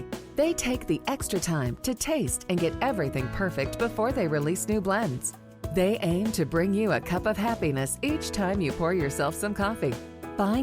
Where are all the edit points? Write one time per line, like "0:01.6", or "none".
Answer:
none